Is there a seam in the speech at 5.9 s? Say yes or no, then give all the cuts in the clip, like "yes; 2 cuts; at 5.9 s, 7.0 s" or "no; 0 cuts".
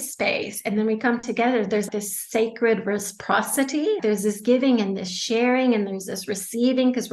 no; 2 cuts; at 1.9 s, 4.0 s